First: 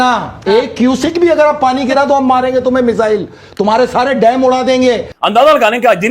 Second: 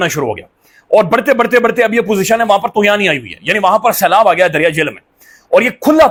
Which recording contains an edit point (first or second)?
first